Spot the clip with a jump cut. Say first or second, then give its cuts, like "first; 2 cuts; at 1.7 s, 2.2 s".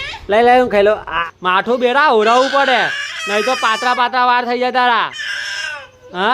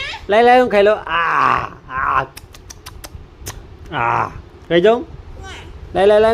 first; 1 cut; at 1.1 s